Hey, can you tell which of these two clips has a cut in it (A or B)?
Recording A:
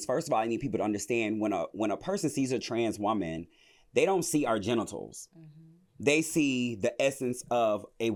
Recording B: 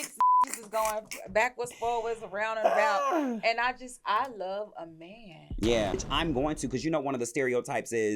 B